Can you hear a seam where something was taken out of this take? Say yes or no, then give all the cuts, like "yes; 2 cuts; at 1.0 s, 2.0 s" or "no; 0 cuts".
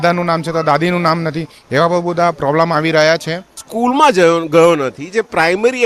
yes; 1 cut; at 3.7 s